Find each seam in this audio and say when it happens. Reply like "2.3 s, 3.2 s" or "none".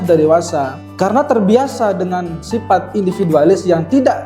none